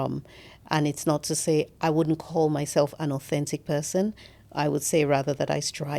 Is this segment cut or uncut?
uncut